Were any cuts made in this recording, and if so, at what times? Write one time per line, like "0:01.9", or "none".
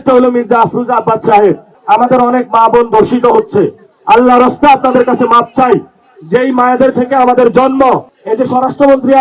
0:01.7
0:08.2

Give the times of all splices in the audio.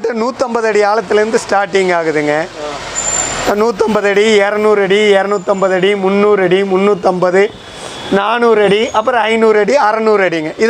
none

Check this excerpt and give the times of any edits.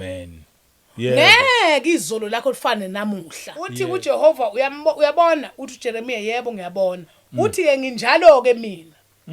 0:03.7

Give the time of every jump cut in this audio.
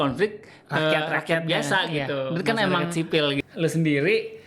0:03.4

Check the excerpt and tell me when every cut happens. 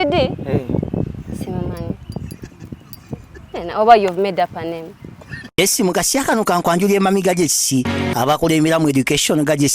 0:05.5

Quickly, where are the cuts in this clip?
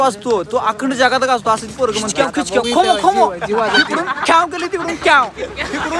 0:02.1

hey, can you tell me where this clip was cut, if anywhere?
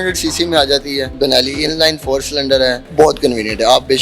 0:01.1
0:02.8

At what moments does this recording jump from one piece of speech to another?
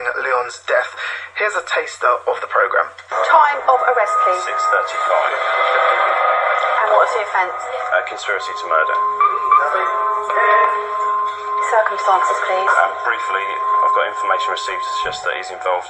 0:13.4

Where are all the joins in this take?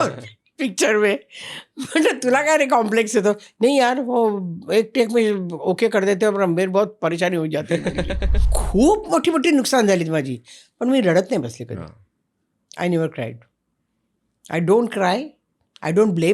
0:08.5

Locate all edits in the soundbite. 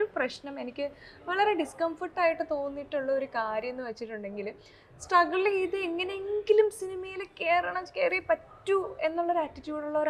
none

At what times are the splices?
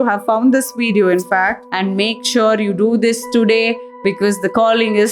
0:01.6

